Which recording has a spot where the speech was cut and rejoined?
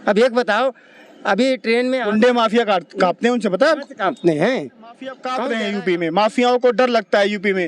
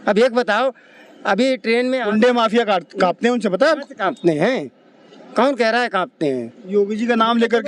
first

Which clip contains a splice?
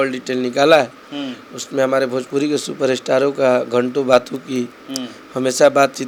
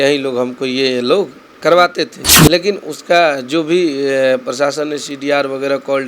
second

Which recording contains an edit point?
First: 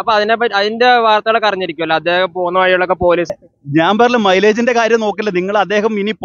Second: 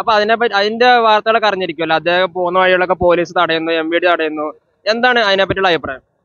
first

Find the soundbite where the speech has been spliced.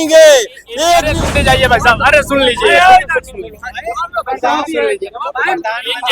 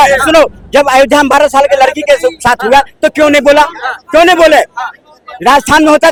first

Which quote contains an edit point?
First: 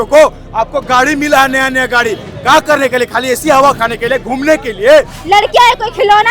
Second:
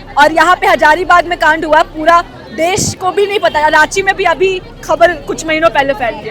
first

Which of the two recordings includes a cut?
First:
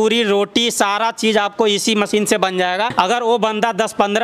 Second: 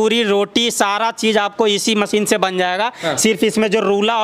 first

